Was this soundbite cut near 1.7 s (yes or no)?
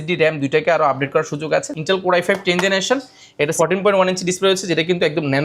yes